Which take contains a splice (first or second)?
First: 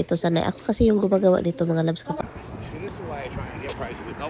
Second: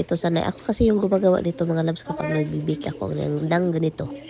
first